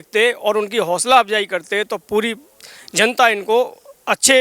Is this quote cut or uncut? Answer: uncut